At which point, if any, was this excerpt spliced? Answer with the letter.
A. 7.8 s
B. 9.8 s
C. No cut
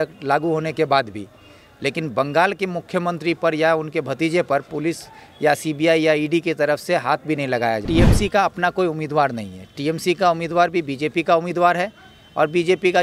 A